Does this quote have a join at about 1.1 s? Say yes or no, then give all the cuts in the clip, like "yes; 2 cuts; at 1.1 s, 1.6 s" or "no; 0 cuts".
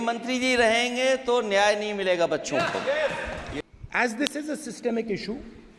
no; 1 cut; at 3.6 s